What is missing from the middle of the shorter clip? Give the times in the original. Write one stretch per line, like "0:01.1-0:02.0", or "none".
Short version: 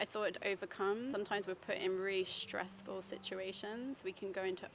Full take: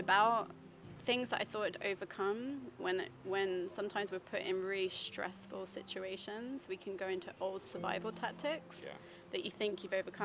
0:02.5-0:03.7